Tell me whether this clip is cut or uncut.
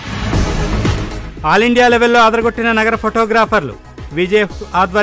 uncut